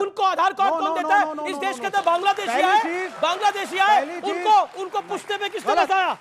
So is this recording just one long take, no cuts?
no; 1 cut; at 1.4 s

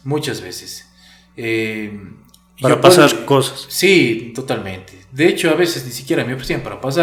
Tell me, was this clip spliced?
no; 0 cuts

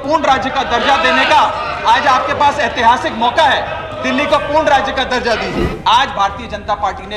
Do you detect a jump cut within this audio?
yes; 1 cut; at 5.7 s

